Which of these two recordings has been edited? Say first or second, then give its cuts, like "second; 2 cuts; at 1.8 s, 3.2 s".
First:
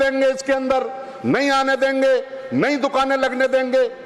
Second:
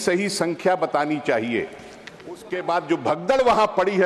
second; 1 cut; at 2.5 s